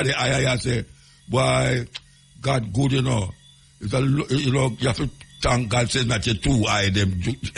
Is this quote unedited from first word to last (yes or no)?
yes